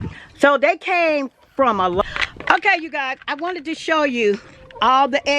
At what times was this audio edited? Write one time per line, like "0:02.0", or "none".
0:02.0